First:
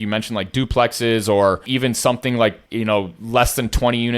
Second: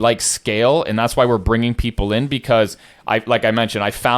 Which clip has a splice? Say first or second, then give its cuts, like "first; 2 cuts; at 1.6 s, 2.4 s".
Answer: first; 2 cuts; at 1.6 s, 2.6 s